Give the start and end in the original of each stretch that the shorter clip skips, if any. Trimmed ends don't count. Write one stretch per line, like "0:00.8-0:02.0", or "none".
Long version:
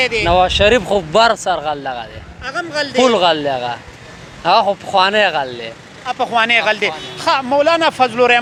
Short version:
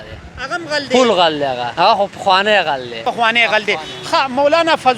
0:03.7-0:04.3
0:05.6-0:06.1